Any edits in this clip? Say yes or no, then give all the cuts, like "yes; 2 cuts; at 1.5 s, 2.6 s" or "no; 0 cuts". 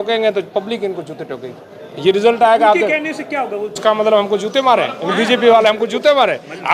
yes; 1 cut; at 3.8 s